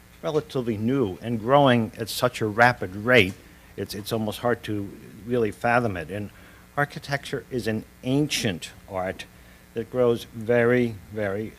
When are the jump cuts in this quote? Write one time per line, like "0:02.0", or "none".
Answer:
0:07.0